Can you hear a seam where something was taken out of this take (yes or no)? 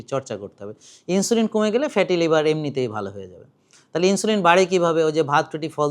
no